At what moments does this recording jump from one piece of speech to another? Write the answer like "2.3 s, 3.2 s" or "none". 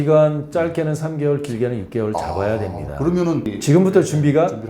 3.5 s